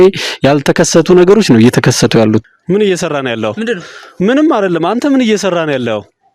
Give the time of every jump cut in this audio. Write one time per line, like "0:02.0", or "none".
0:02.5